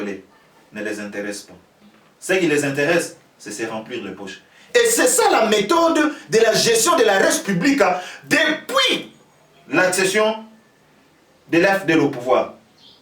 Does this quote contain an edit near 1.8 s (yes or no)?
no